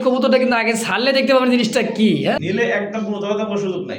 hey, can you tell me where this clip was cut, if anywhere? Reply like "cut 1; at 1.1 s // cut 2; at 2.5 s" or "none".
cut 1; at 2.4 s